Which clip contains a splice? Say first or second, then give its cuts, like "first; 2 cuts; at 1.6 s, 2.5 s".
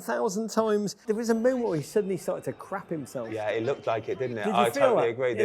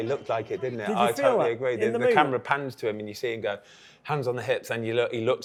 first; 1 cut; at 1.0 s